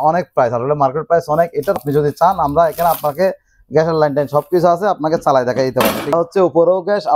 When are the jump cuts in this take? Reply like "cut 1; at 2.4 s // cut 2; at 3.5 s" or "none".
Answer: cut 1; at 1.8 s // cut 2; at 6.1 s

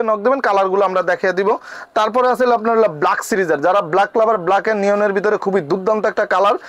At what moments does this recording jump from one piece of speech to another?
none

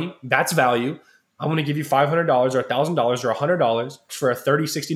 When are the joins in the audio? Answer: cut 1; at 4.0 s

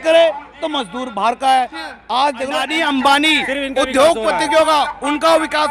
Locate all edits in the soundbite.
cut 1; at 2.7 s

